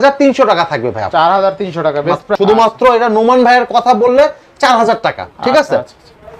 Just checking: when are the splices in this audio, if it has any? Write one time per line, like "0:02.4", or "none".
0:02.2